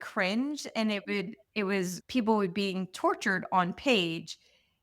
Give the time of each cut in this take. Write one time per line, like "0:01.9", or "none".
0:02.0